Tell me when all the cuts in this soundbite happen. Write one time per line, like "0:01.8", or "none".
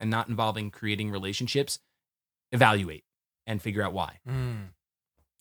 none